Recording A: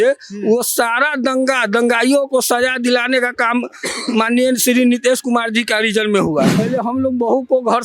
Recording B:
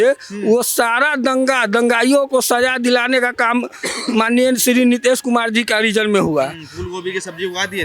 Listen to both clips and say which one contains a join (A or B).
A